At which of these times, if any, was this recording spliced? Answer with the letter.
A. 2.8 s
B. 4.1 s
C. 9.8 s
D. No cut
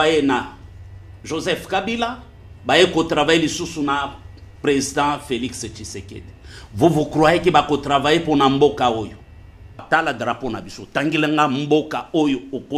C